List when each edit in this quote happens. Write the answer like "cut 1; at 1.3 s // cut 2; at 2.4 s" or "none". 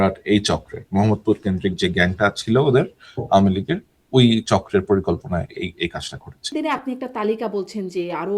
cut 1; at 6.5 s